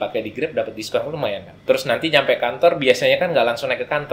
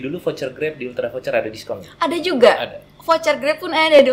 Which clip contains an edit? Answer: first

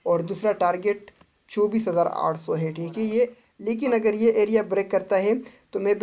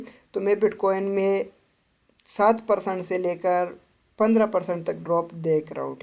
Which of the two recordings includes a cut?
first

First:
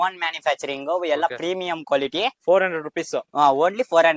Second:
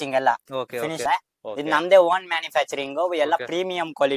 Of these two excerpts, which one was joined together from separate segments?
second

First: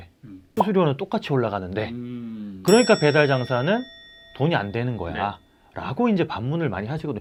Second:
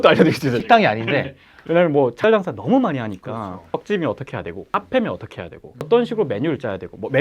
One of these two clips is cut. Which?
second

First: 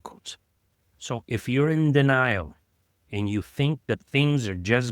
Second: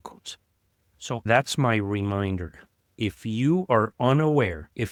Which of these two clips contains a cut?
first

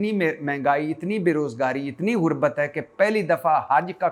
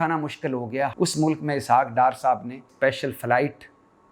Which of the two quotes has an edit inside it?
second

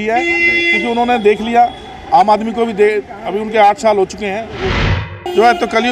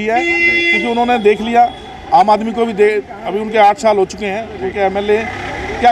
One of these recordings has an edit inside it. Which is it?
first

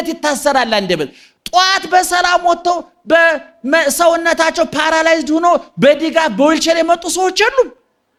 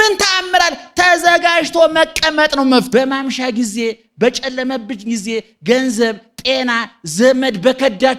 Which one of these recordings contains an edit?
second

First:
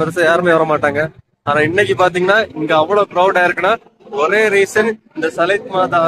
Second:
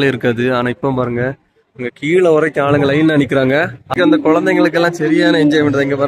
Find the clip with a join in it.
second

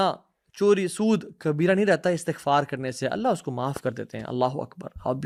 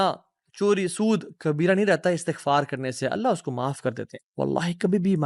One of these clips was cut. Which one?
second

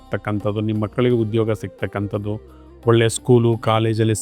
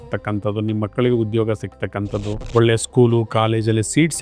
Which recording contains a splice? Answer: second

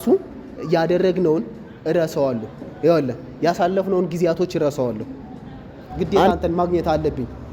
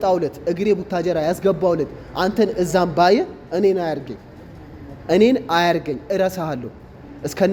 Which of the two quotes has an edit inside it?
first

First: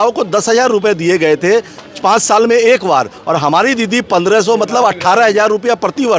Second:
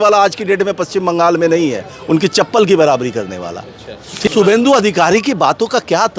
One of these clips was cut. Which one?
second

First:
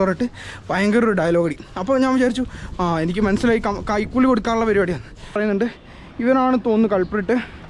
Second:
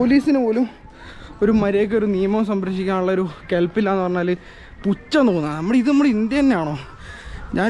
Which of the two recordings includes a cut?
first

